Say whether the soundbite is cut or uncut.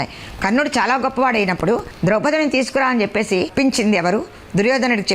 cut